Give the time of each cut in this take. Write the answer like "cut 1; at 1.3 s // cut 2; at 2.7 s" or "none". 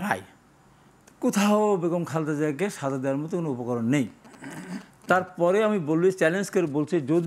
none